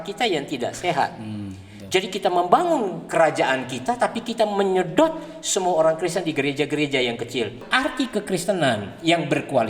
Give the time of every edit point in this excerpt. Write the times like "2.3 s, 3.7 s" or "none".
7.6 s